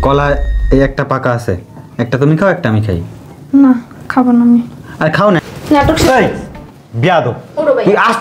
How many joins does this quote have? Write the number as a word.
one